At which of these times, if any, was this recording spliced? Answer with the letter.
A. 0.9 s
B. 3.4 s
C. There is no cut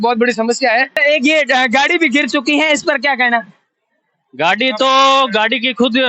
A